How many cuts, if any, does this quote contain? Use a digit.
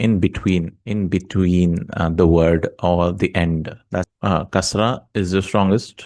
1